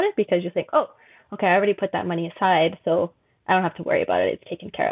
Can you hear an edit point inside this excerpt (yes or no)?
no